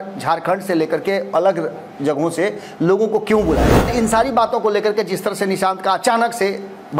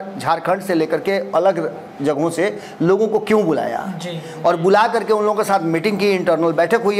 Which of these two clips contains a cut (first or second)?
first